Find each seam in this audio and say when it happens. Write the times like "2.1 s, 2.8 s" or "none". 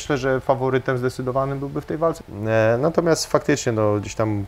2.2 s